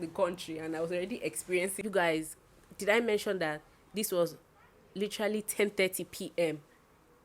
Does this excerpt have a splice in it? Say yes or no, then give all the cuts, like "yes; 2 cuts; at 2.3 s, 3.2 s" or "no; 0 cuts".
yes; 1 cut; at 1.8 s